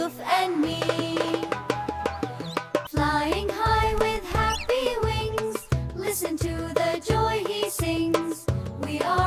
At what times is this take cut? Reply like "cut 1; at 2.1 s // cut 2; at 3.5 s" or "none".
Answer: none